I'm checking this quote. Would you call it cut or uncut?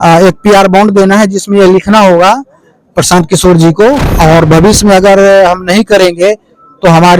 cut